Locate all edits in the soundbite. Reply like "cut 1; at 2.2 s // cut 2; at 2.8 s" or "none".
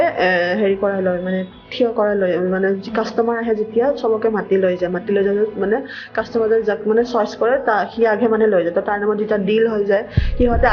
none